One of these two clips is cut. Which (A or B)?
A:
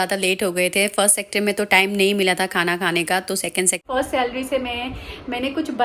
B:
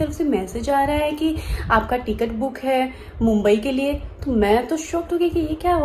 A